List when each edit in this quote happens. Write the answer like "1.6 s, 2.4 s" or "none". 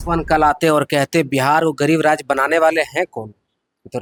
none